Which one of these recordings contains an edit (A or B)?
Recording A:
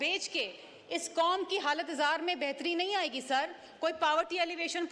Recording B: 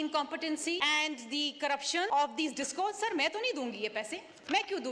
B